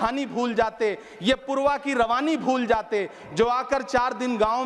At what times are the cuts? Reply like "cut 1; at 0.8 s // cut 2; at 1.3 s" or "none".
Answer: none